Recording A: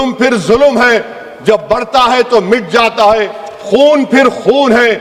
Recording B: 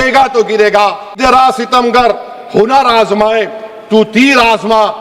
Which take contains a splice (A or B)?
B